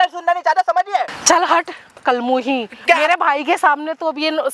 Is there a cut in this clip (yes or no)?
yes